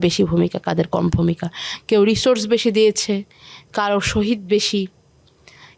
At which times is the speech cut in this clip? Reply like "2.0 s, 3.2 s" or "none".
none